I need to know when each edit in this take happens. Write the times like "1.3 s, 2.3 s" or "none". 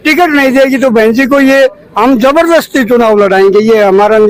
none